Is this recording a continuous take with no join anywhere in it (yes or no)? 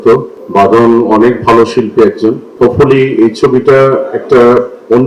yes